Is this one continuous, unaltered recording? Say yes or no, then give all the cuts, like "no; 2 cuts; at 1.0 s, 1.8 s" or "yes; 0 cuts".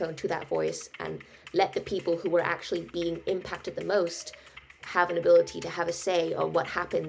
no; 1 cut; at 4.8 s